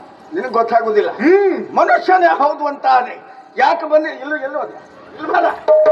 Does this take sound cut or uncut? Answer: uncut